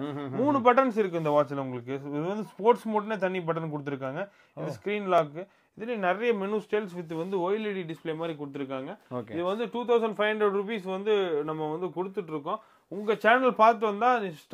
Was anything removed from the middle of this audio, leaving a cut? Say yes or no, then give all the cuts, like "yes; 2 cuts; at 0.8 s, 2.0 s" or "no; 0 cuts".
no; 0 cuts